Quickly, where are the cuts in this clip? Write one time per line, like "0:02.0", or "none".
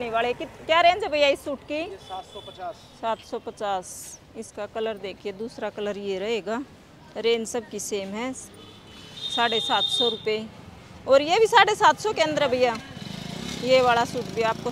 none